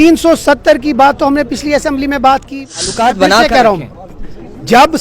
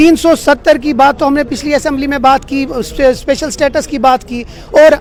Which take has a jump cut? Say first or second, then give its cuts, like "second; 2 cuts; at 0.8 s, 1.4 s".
first; 1 cut; at 2.9 s